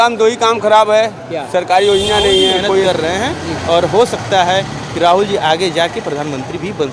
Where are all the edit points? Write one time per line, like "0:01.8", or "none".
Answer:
0:02.8